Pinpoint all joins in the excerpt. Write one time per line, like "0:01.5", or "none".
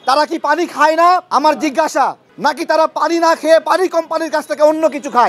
0:01.3
0:02.3